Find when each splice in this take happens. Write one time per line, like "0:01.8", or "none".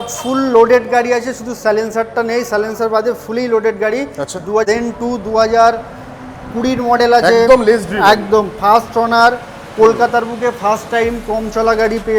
0:04.7